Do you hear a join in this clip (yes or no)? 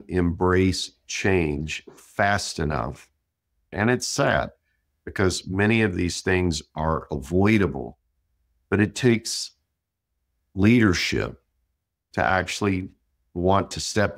yes